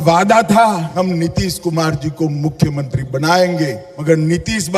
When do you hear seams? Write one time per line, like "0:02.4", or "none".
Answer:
0:00.9
0:03.9